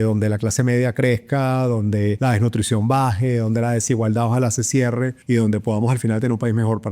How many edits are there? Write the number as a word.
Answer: two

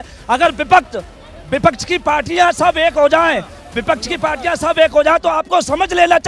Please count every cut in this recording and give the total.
zero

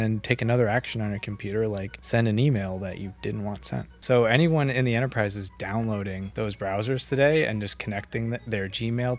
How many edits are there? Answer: two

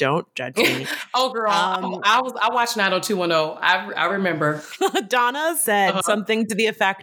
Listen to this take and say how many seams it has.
one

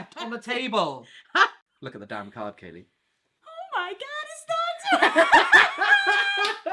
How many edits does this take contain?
one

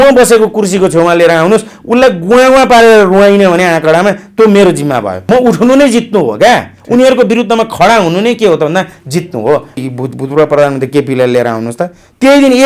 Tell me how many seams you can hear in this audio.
two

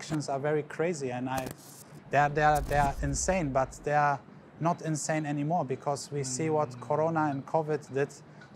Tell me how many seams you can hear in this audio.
zero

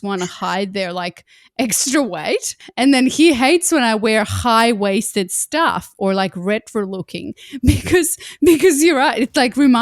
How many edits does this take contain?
one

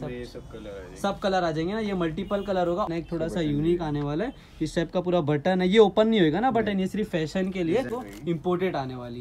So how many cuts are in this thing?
two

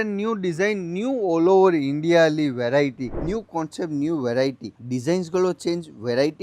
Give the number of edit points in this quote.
one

